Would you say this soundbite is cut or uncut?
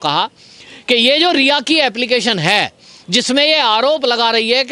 uncut